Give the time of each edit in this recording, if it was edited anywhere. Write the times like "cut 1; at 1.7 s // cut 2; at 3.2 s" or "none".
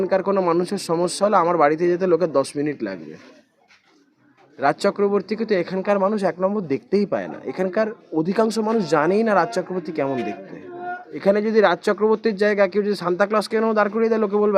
cut 1; at 11.1 s